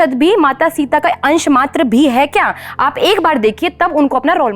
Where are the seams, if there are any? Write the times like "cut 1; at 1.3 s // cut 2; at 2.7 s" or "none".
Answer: none